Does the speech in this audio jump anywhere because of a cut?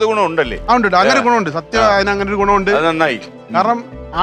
no; 0 cuts

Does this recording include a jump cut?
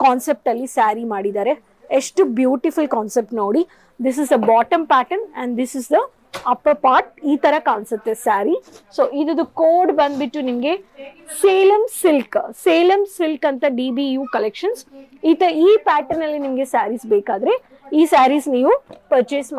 no; 0 cuts

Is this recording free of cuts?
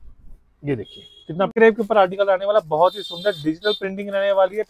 no; 1 cut; at 1.5 s

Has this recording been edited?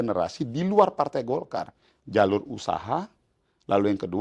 no; 0 cuts

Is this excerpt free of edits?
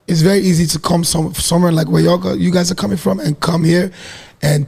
yes; 0 cuts

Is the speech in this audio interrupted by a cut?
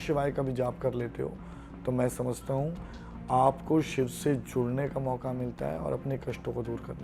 no; 0 cuts

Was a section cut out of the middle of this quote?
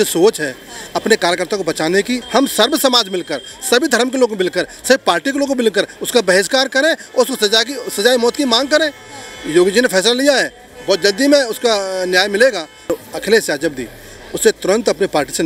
yes; 2 cuts; at 2.2 s, 12.9 s

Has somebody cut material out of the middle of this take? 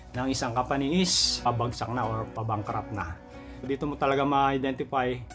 yes; 2 cuts; at 1.5 s, 3.7 s

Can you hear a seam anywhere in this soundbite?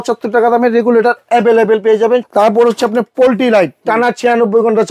yes; 1 cut; at 2.3 s

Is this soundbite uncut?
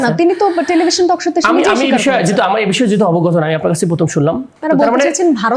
no; 1 cut; at 4.5 s

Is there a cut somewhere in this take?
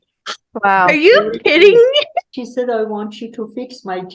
yes; 1 cut; at 2.3 s

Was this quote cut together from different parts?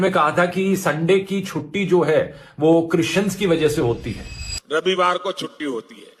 no; 0 cuts

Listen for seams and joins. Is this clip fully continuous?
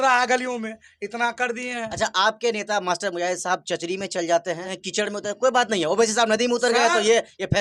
no; 1 cut; at 4.8 s

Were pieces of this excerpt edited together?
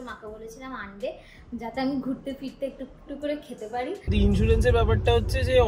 yes; 1 cut; at 4.1 s

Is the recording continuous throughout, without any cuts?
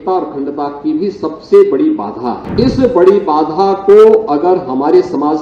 no; 1 cut; at 2.5 s

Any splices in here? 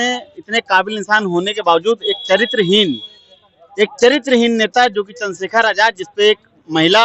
no; 0 cuts

